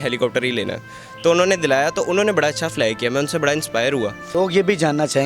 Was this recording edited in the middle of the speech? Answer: yes; 1 cut; at 4.2 s

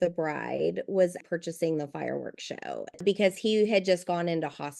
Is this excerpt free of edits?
no; 1 cut; at 2.9 s

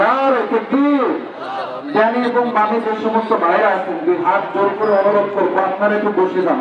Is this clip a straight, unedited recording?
yes; 0 cuts

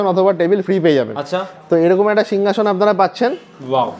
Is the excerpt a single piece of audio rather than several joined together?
yes; 0 cuts

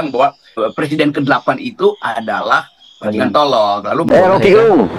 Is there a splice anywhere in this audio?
yes; 1 cut; at 4.1 s

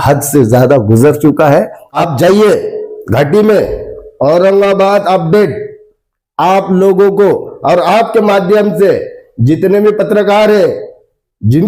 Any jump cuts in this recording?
yes; 1 cut; at 2.0 s

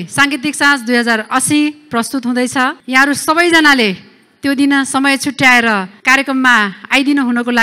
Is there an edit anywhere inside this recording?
yes; 2 cuts; at 2.8 s, 5.9 s

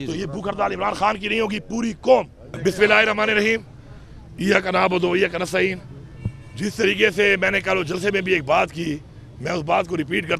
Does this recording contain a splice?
yes; 1 cut; at 2.4 s

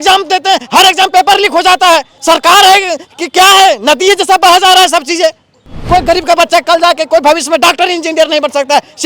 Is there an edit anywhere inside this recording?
yes; 2 cuts; at 2.1 s, 5.8 s

